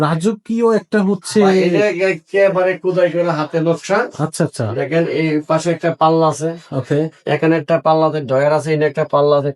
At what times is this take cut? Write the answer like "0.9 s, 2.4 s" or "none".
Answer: none